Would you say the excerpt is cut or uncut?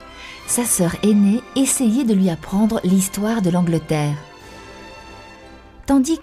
uncut